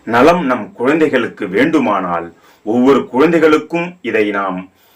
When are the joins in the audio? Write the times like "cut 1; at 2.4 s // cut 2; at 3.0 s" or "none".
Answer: none